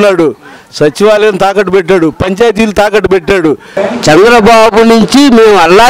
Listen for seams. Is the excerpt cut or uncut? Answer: cut